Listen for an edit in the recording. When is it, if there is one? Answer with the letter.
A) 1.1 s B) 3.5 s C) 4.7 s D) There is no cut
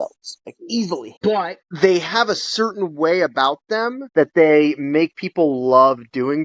A